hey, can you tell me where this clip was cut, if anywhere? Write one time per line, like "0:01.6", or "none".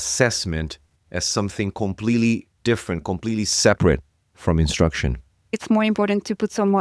0:05.6